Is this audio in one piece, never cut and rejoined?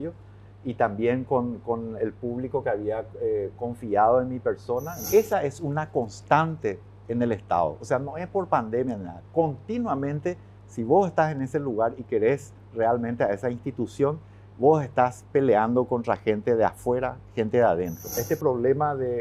no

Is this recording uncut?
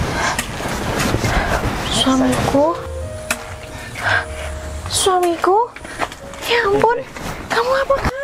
yes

